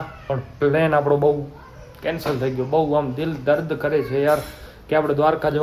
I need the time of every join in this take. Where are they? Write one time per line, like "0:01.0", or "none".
none